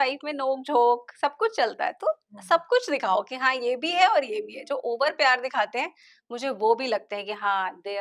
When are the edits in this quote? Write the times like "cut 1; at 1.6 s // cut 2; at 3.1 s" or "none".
none